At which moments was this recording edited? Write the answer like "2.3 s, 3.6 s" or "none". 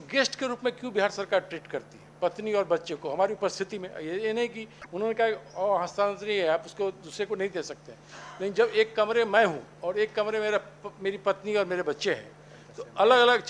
none